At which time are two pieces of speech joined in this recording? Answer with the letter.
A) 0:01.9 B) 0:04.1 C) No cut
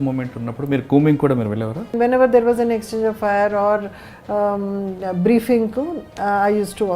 A